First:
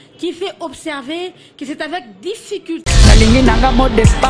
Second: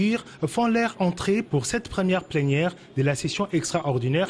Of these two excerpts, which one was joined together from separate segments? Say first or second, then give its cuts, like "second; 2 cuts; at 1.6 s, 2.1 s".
first; 1 cut; at 2.8 s